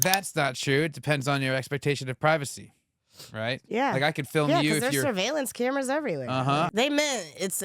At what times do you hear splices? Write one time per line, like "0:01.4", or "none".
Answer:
0:06.7